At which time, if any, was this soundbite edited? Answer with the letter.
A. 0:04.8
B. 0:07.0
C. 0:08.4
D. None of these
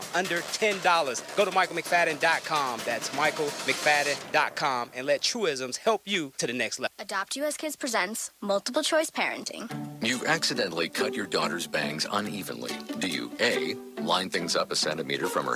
B